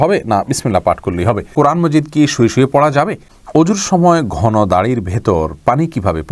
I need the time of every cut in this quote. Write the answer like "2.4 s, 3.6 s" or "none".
1.5 s, 3.3 s